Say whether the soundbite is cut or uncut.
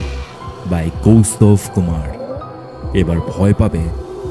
uncut